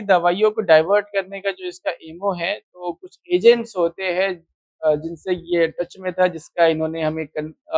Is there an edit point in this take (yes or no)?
no